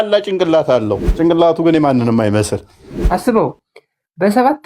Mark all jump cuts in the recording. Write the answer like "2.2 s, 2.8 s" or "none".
1.0 s, 2.9 s